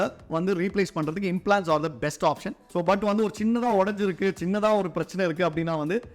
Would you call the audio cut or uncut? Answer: cut